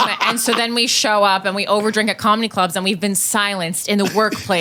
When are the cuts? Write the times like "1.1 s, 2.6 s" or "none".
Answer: none